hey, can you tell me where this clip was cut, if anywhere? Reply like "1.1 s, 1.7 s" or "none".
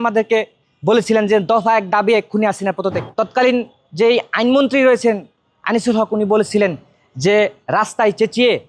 3.0 s